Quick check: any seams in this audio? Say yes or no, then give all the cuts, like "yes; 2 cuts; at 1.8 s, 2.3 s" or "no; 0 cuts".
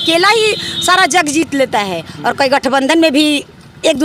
no; 0 cuts